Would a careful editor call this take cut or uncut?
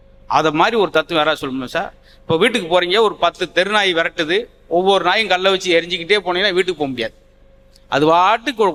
uncut